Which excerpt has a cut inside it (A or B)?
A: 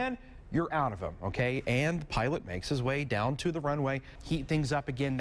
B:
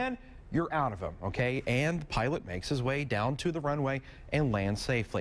A